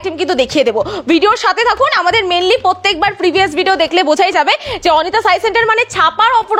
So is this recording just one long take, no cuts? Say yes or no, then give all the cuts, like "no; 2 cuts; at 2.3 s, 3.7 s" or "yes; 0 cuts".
yes; 0 cuts